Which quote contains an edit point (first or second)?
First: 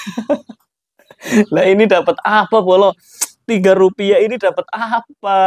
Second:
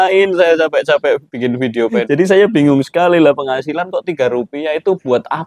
second